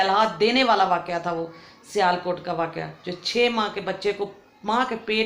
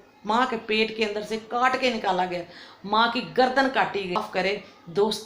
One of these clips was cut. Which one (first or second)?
second